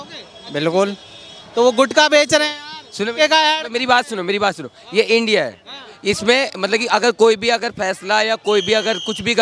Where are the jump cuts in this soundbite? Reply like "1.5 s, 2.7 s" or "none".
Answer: none